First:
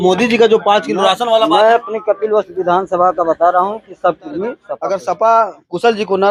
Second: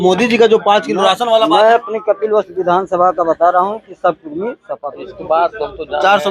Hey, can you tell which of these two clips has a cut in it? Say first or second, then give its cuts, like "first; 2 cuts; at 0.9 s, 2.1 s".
second; 1 cut; at 4.8 s